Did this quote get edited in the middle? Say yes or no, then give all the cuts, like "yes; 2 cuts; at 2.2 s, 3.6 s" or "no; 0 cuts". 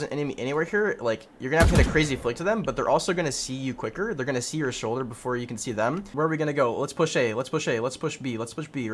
yes; 1 cut; at 6.1 s